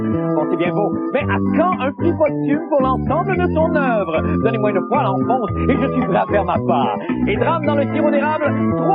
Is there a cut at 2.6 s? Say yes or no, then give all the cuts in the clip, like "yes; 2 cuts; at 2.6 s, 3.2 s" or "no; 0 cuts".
no; 1 cut; at 6.3 s